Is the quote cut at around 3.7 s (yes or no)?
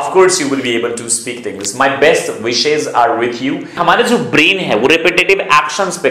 yes